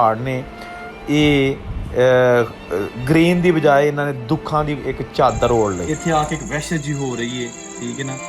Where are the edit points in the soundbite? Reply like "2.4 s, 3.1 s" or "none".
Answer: 5.8 s